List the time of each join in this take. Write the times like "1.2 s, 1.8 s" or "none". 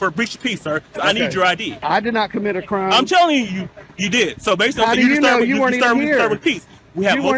1.7 s